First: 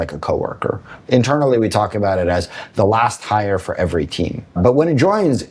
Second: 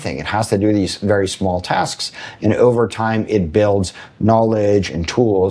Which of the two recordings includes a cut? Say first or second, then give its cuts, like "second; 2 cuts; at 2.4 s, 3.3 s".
first; 2 cuts; at 1.0 s, 4.6 s